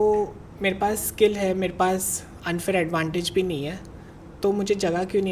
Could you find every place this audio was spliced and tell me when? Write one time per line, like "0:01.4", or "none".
none